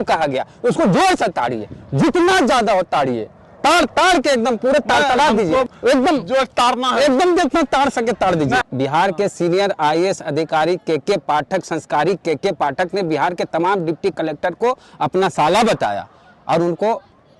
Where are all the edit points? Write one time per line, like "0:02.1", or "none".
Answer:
0:05.7
0:08.6